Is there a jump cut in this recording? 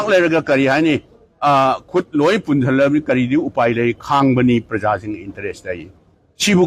no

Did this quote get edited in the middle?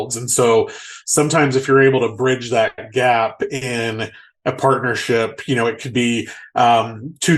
no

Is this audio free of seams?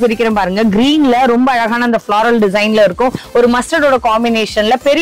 no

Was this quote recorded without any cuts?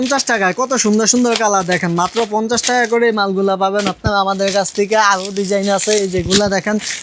yes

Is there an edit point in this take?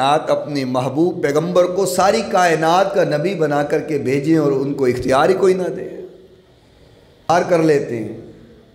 yes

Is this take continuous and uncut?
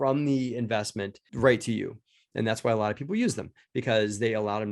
yes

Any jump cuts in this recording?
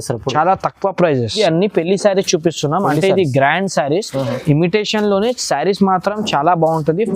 yes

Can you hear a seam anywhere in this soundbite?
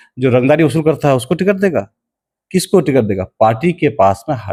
no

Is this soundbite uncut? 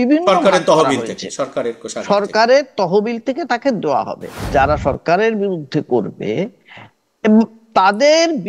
no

